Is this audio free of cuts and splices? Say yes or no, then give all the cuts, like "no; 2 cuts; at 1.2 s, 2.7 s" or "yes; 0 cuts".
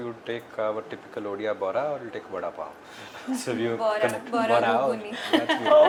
yes; 0 cuts